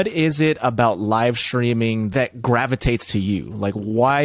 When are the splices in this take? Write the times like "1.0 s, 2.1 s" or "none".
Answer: 2.1 s

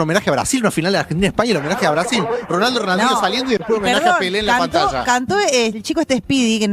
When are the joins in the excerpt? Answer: none

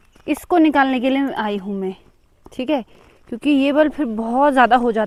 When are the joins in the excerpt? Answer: none

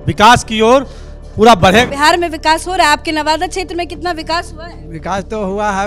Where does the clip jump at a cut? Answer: 1.9 s

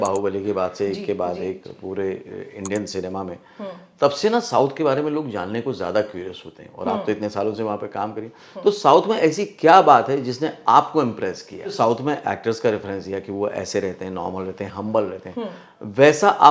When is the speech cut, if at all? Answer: 11.7 s

